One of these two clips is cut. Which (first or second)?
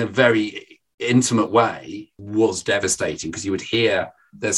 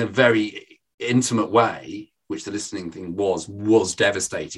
first